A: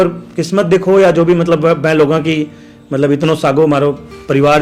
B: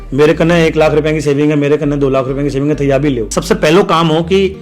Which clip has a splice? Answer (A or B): B